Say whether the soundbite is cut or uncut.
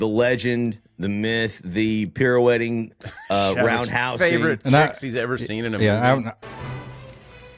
uncut